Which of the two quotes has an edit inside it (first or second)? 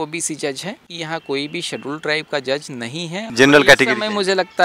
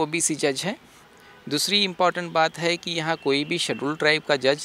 first